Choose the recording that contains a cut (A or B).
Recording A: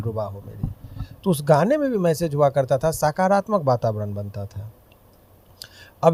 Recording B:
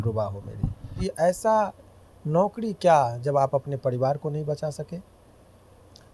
B